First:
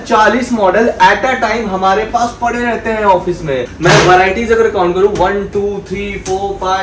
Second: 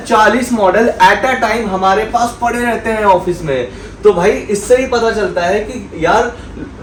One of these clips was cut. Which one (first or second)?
first